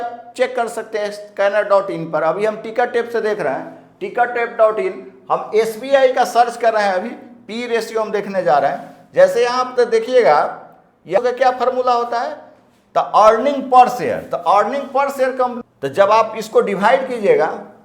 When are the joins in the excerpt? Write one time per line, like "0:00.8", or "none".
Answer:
0:11.2
0:15.6